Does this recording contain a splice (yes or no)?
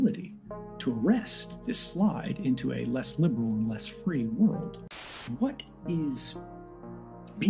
yes